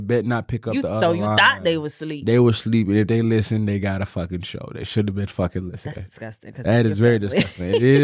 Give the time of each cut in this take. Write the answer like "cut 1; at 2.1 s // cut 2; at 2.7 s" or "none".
none